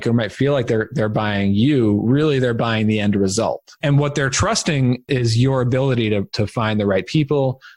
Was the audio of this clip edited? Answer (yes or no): yes